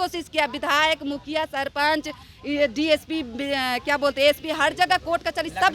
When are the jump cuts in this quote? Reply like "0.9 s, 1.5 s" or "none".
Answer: none